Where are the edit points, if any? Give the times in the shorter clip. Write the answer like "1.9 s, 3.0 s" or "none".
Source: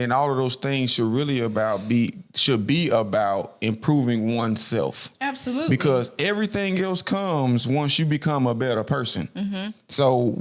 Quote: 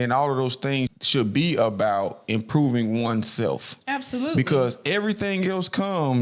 0.9 s

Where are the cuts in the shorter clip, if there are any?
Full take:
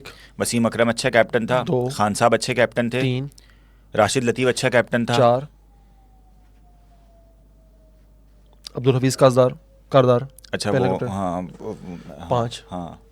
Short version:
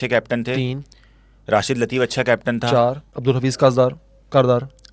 3.1 s

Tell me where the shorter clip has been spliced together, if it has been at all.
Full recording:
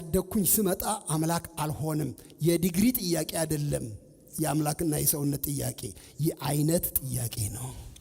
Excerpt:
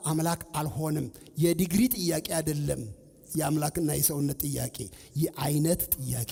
none

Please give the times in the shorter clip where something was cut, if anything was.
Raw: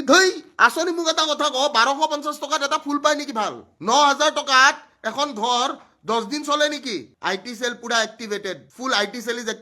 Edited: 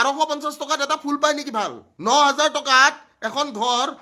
none

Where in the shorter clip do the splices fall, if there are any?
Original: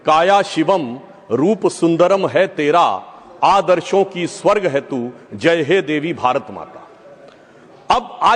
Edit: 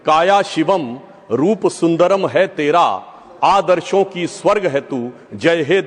none

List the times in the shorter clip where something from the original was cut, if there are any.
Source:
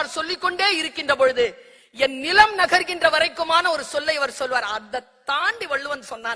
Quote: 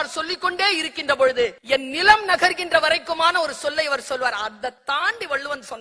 1.6 s, 4.8 s

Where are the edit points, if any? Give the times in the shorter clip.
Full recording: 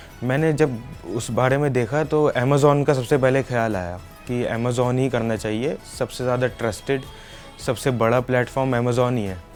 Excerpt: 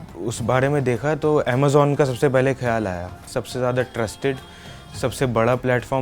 3.2 s

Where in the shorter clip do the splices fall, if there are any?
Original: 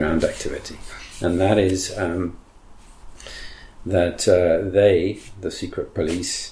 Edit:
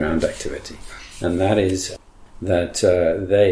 1.9 s

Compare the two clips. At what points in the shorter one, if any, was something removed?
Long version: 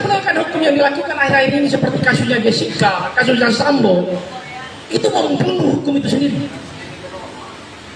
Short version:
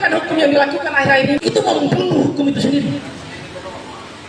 1.4 s

